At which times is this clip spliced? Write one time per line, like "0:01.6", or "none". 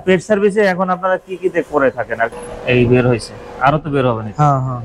0:02.3